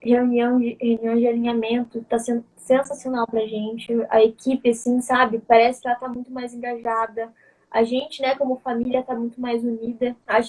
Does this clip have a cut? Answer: no; 0 cuts

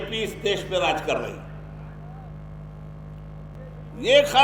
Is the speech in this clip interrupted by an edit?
yes; 1 cut; at 3.5 s

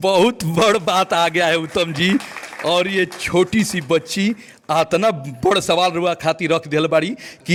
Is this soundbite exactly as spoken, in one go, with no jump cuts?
yes; 0 cuts

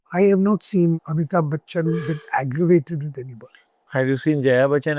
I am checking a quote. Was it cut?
yes; 1 cut; at 1.0 s

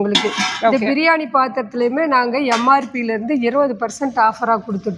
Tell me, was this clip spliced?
no; 0 cuts

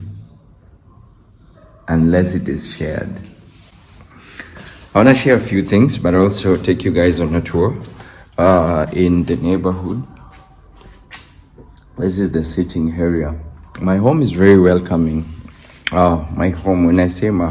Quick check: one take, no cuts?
yes; 0 cuts

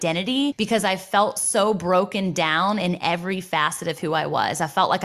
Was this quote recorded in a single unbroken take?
yes; 0 cuts

